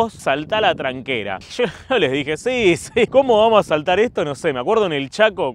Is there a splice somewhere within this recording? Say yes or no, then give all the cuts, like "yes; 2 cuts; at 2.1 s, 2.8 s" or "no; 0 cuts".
no; 0 cuts